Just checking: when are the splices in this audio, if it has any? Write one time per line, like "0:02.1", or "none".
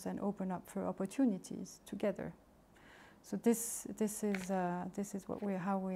none